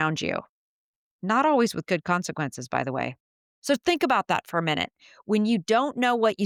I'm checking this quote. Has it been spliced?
no; 0 cuts

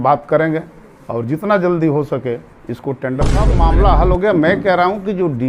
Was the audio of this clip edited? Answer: yes; 1 cut; at 3.5 s

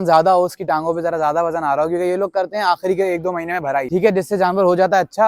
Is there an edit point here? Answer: yes; 1 cut; at 3.9 s

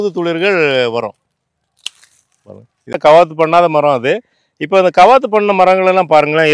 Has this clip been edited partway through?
yes; 1 cut; at 3.0 s

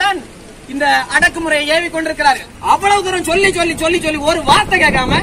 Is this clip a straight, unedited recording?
no; 1 cut; at 2.5 s

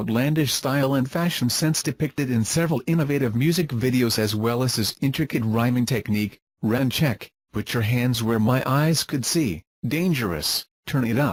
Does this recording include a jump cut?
no; 0 cuts

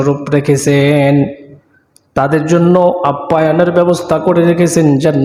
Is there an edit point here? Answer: no; 0 cuts

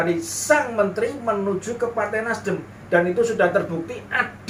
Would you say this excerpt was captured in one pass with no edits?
yes; 0 cuts

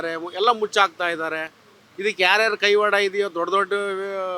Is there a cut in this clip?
no; 0 cuts

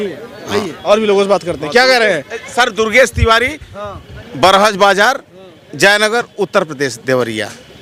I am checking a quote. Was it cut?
no; 0 cuts

